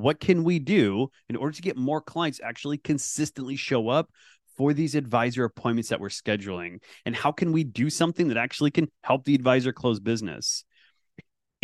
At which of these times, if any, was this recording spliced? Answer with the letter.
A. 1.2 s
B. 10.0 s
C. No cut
C